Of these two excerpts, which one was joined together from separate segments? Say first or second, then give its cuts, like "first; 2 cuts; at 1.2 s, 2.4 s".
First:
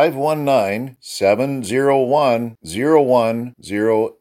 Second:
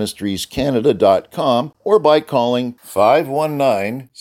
second; 1 cut; at 1.7 s